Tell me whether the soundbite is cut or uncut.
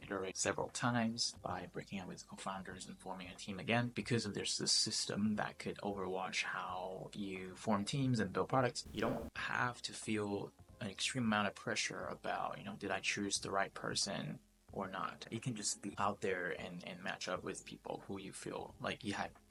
uncut